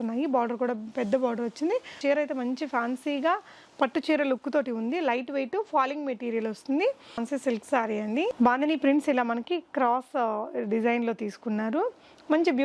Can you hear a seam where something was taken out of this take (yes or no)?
yes